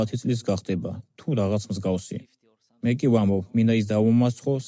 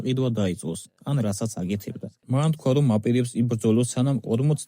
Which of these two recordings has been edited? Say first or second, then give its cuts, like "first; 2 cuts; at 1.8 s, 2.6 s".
second; 1 cut; at 2.1 s